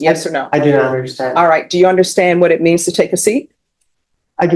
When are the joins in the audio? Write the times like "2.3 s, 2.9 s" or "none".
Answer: none

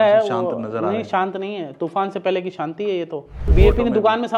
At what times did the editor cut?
3.4 s

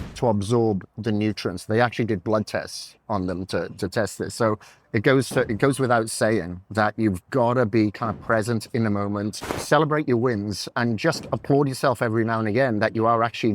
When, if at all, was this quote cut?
9.6 s

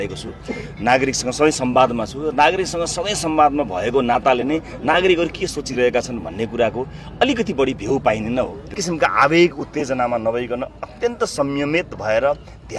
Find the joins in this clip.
8.7 s

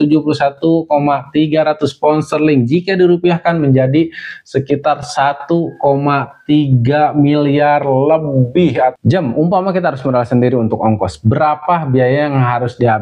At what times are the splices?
8.9 s

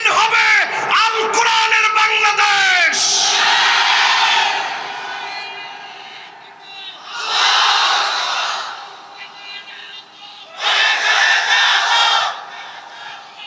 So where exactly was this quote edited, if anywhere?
none

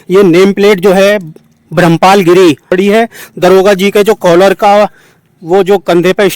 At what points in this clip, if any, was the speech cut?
2.7 s

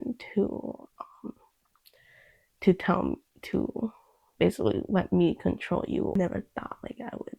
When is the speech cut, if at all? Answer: 6.2 s

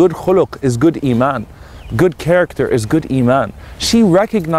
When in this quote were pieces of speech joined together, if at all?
none

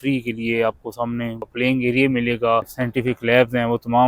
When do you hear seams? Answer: 1.4 s, 2.8 s

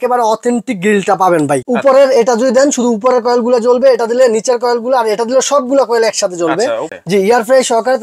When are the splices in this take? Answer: 1.6 s, 6.9 s

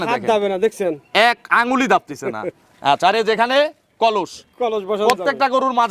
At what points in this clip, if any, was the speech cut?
none

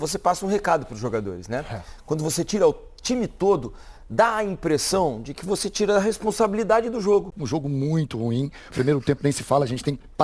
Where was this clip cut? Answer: 7.4 s

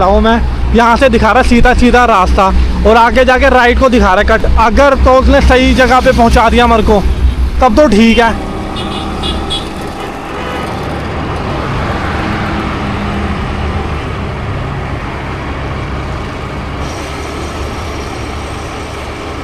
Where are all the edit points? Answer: none

